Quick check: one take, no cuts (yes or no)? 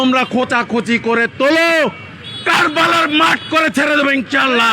yes